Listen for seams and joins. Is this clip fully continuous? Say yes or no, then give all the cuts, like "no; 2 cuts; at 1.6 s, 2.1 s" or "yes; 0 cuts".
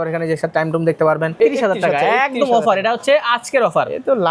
no; 1 cut; at 1.3 s